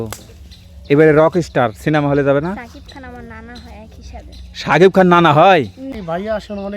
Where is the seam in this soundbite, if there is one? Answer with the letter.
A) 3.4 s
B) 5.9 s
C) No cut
B